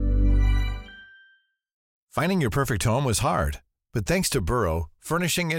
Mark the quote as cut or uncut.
cut